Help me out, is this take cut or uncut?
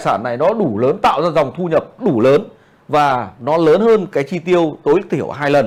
uncut